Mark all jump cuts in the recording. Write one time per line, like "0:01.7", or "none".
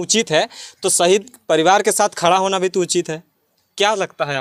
none